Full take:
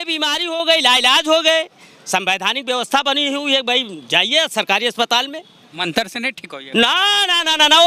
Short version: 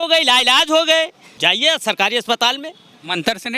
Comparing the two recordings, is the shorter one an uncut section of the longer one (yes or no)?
no